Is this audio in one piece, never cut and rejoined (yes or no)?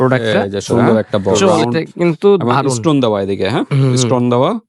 no